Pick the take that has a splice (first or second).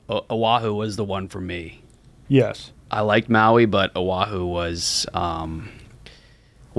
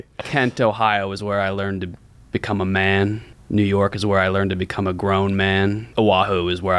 second